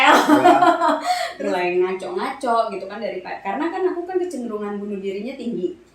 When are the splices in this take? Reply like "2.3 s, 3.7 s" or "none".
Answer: 1.3 s